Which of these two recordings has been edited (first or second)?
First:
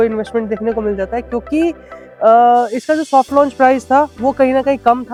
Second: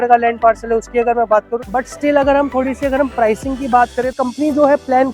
second